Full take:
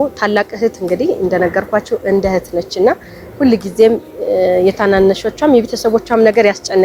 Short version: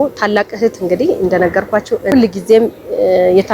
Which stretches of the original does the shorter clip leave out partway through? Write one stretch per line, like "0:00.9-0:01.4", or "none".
0:02.0-0:03.3